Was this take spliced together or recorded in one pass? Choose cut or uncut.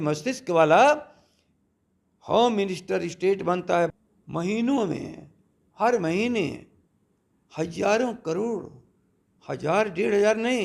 cut